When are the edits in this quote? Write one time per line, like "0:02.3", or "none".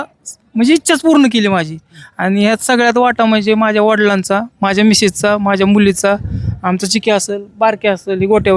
none